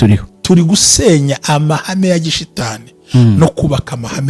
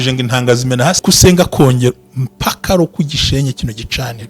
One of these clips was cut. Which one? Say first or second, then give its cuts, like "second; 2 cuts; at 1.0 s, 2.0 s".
second; 1 cut; at 1.0 s